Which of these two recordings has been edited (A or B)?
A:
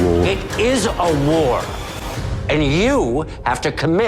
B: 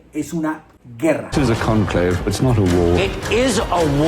B